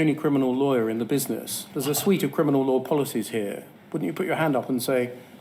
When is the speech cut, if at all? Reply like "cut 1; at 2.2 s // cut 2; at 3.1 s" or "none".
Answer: none